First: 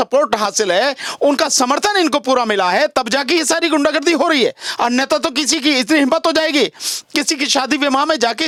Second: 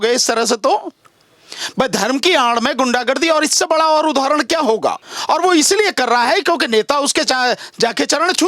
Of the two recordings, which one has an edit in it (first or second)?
second